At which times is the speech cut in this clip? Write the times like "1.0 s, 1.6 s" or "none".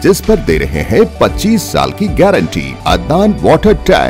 2.7 s

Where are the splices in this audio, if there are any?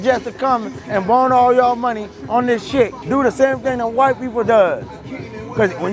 3.0 s

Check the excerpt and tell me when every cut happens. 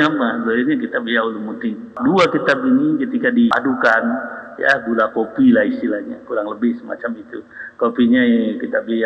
1.9 s, 3.5 s

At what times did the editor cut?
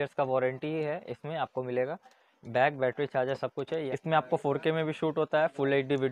3.9 s

